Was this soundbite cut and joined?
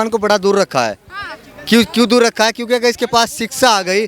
no; 0 cuts

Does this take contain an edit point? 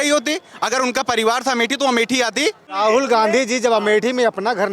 yes; 1 cut; at 2.7 s

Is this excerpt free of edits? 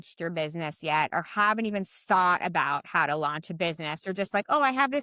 yes; 0 cuts

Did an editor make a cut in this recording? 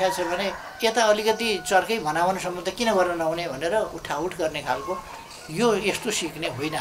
no; 0 cuts

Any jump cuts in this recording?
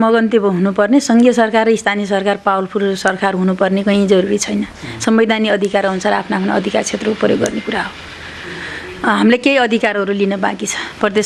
no; 0 cuts

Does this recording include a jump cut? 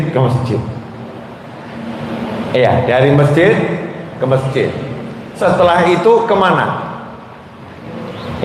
yes; 1 cut; at 5.2 s

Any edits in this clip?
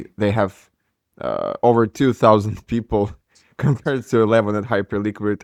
no; 0 cuts

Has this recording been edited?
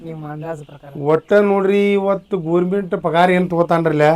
no; 0 cuts

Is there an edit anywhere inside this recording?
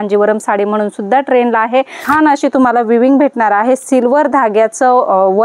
yes; 1 cut; at 2.1 s

